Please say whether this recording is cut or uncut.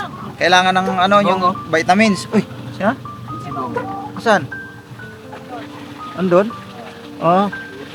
uncut